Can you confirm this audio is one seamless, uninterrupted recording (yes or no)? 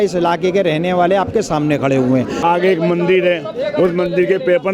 no